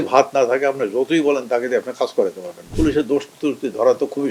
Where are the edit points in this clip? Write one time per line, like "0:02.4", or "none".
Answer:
0:02.7